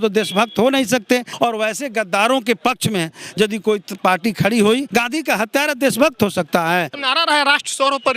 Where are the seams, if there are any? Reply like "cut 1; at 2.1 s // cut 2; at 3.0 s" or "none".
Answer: cut 1; at 1.3 s // cut 2; at 4.9 s // cut 3; at 7.0 s